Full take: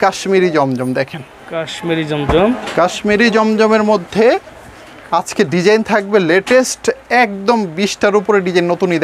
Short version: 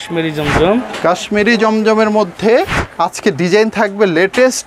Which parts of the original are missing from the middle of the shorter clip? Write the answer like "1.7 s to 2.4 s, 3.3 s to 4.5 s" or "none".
4.5 s to 4.9 s